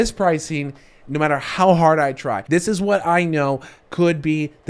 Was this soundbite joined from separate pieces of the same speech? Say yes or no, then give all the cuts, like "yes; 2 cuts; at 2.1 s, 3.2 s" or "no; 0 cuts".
yes; 1 cut; at 2.4 s